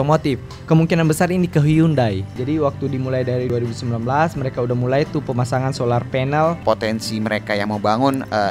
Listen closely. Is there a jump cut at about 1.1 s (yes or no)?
no